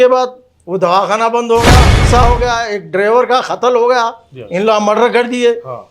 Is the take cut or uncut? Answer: cut